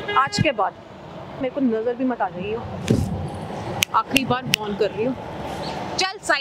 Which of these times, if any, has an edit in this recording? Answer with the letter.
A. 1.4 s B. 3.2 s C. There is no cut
A